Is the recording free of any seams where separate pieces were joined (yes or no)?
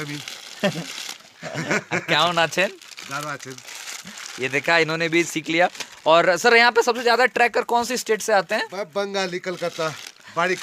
yes